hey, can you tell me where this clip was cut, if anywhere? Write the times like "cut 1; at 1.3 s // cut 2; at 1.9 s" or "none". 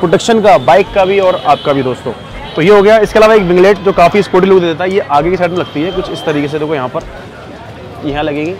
none